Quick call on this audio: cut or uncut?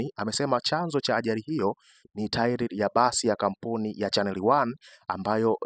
uncut